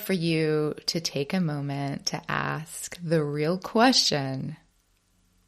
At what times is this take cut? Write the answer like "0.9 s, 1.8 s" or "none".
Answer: none